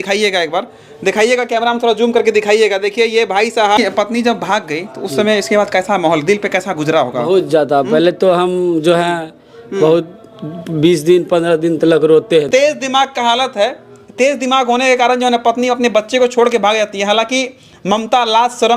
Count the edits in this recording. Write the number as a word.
two